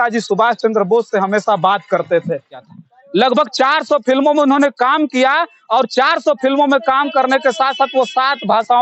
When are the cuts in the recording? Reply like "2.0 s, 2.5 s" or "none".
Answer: 2.7 s